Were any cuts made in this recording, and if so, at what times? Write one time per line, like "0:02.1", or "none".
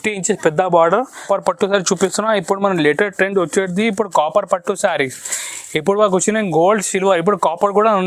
0:01.2